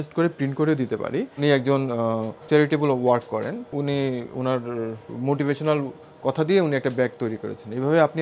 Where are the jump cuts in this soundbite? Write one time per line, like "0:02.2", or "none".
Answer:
0:01.4
0:02.3
0:03.7
0:05.0

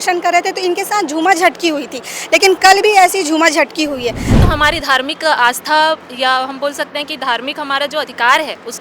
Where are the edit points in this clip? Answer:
0:04.4

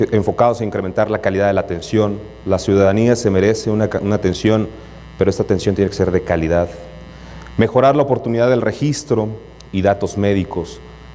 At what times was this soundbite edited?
0:08.8

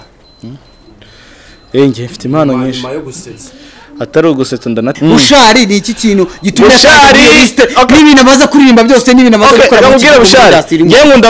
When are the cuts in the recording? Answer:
0:04.9

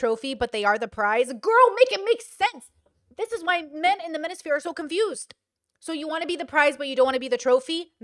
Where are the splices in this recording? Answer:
none

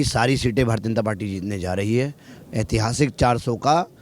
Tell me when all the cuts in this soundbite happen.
none

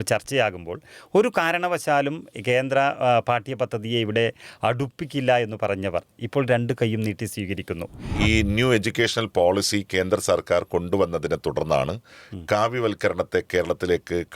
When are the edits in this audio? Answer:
0:08.1

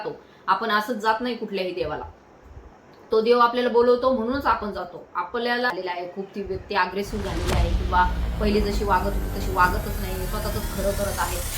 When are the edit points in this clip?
0:05.7

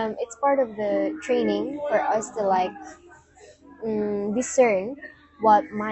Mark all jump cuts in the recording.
none

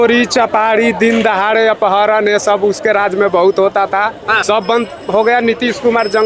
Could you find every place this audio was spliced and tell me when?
0:04.3

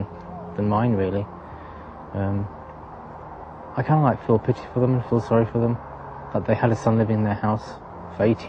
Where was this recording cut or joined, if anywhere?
0:02.6

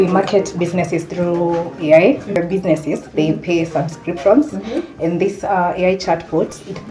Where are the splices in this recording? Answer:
0:02.3

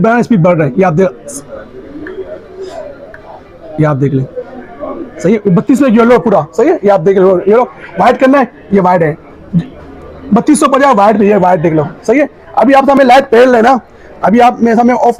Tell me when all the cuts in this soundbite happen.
none

